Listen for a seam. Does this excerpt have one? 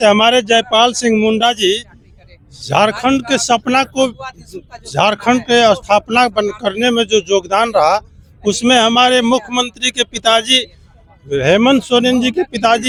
no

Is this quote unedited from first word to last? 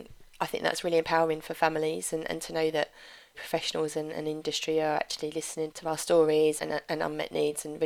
yes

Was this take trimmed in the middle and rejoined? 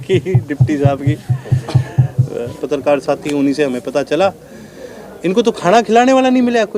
yes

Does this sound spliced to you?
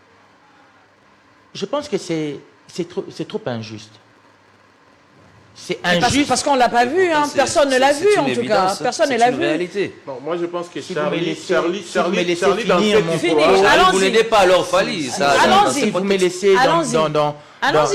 no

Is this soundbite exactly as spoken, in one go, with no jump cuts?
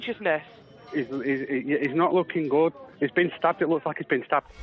no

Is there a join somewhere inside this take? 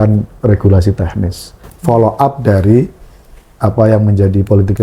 no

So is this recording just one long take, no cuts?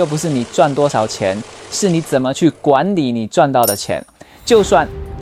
yes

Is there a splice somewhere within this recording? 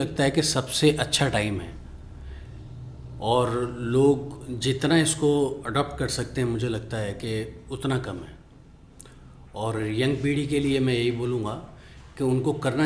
no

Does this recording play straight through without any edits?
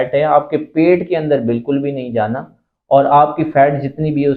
yes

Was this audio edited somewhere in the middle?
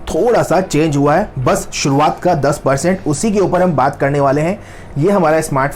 no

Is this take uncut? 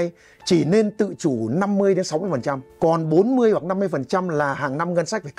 no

